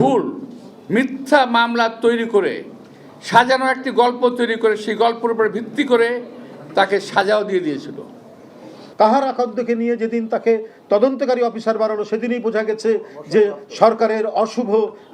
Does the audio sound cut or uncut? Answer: cut